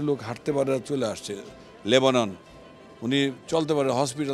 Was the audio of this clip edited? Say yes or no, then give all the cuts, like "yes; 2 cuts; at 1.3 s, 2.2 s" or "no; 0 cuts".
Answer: no; 0 cuts